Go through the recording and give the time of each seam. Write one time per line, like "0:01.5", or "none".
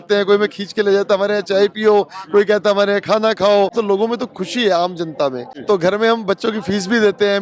0:03.7
0:05.5